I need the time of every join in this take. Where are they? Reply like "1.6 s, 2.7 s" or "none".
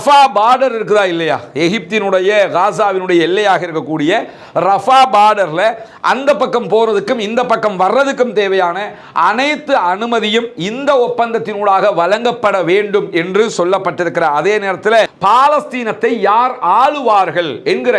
15.1 s